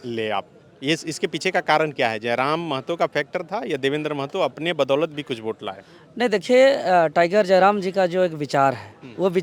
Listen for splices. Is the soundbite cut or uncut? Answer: uncut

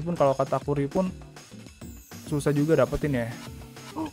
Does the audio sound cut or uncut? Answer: uncut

